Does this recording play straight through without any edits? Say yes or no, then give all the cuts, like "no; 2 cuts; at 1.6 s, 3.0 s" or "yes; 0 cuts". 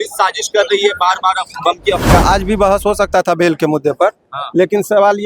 no; 1 cut; at 2.1 s